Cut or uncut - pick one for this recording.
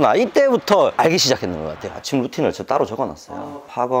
cut